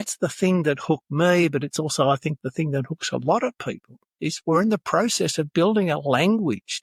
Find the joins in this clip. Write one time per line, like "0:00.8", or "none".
none